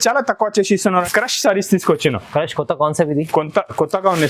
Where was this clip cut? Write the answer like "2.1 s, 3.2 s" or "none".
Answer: 1.0 s